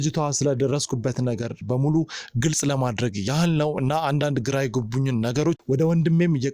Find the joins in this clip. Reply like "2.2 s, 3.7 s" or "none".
5.6 s